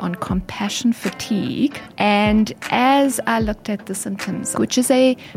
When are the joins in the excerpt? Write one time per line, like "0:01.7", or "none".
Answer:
0:01.8
0:04.5